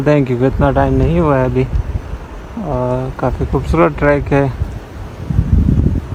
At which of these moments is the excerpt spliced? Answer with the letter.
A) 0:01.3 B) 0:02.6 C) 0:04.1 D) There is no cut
D